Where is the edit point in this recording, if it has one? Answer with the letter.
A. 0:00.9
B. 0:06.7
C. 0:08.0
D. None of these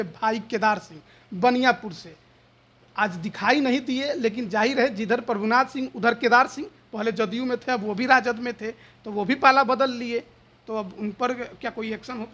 D